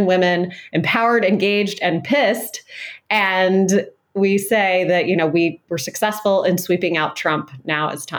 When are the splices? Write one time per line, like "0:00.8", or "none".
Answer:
0:05.6

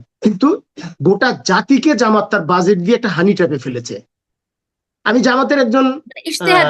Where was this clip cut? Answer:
none

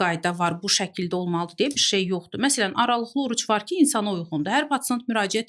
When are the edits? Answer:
none

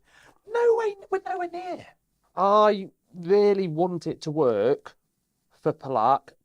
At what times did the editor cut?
0:02.3

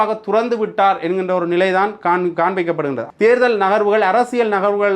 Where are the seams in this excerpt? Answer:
0:03.0

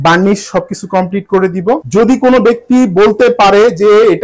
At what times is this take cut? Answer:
0:01.8

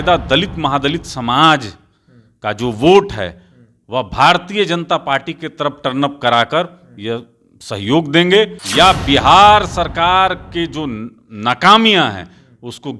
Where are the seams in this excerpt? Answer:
0:08.6

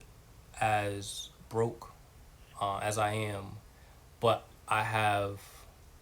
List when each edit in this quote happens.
none

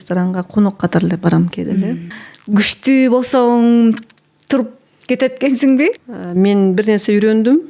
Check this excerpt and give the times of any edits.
0:02.1
0:06.0

